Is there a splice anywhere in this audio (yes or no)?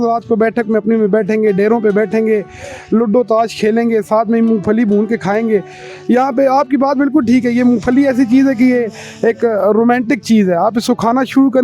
no